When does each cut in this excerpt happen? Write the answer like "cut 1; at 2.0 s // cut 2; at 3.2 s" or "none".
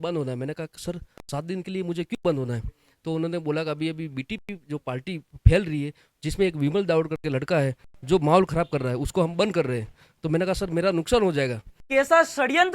cut 1; at 11.8 s

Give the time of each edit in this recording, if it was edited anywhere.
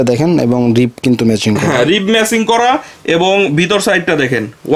none

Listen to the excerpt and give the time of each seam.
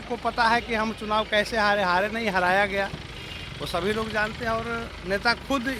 none

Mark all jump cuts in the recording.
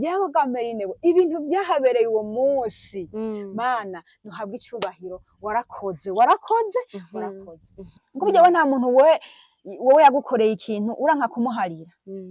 cut 1; at 8.0 s

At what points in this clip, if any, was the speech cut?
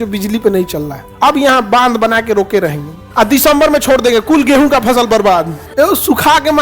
cut 1; at 1.1 s // cut 2; at 3.1 s

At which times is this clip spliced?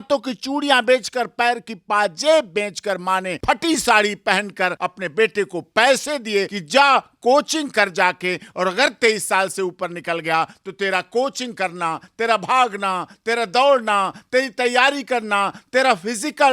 cut 1; at 3.3 s // cut 2; at 4.8 s // cut 3; at 6.6 s

